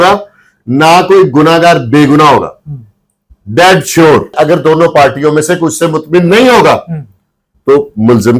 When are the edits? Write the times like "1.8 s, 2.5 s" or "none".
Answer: 4.3 s